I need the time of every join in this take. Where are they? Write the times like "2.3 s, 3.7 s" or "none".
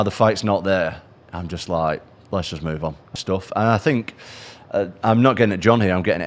3.0 s